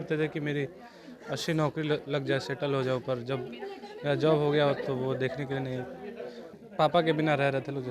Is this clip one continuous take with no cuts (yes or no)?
no